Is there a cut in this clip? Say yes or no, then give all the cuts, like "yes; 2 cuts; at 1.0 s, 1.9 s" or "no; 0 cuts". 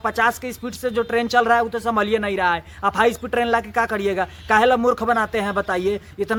no; 0 cuts